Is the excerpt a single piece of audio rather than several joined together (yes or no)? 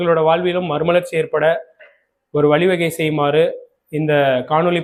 yes